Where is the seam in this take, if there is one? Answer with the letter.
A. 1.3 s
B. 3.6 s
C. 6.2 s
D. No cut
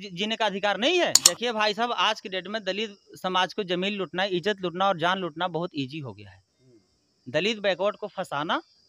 A